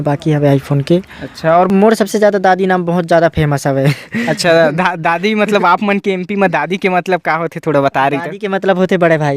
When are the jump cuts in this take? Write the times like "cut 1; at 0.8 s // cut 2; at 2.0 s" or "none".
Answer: cut 1; at 1.7 s